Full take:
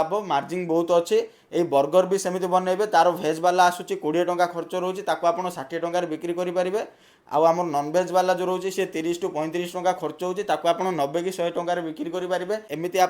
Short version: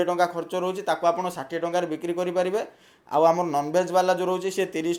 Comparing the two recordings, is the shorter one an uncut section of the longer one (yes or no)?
yes